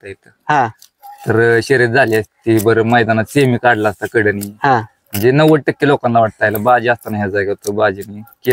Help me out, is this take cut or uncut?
uncut